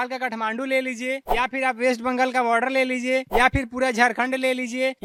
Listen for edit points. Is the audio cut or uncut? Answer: uncut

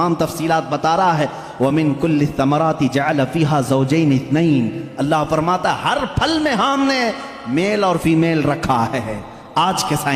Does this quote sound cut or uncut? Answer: uncut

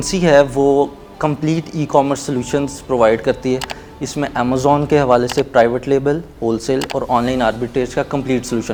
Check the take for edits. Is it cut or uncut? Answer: uncut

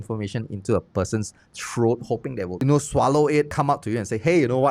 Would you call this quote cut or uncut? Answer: cut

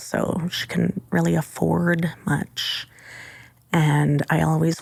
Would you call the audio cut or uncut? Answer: uncut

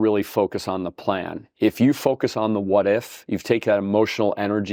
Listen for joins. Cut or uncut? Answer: uncut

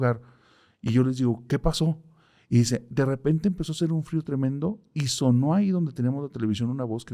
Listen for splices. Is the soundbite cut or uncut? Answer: uncut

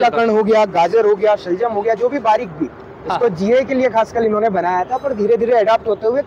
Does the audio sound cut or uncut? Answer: uncut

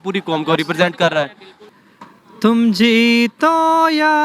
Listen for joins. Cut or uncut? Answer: cut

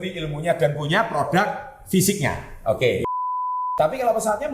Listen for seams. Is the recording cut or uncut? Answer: cut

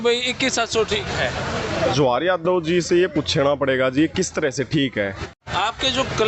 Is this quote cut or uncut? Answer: cut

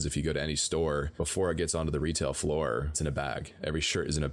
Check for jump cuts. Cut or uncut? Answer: cut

